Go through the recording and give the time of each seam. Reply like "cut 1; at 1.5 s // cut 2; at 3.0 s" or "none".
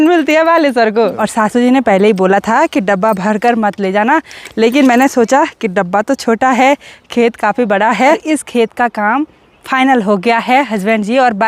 cut 1; at 1.2 s // cut 2; at 8.2 s